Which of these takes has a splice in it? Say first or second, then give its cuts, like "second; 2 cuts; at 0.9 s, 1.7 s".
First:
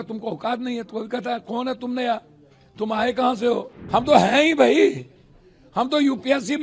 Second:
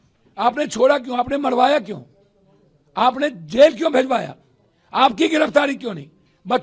first; 1 cut; at 3.8 s